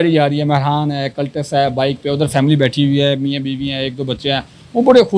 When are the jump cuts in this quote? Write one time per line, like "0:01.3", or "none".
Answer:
none